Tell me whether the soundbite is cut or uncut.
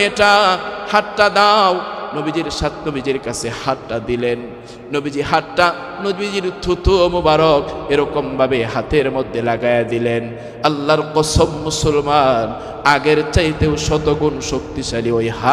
uncut